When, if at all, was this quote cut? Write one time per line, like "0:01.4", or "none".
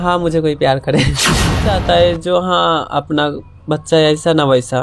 0:01.7